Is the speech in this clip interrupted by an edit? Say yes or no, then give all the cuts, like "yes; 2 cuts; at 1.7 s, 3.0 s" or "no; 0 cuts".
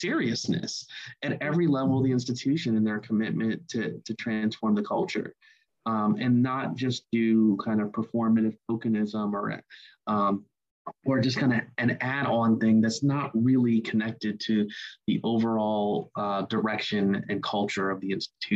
no; 0 cuts